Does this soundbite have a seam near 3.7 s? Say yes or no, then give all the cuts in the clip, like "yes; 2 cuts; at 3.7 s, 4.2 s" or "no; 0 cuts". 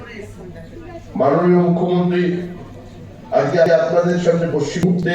yes; 1 cut; at 3.7 s